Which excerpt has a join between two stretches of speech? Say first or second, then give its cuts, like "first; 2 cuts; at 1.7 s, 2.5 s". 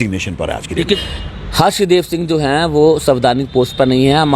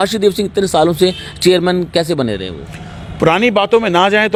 first; 1 cut; at 1.0 s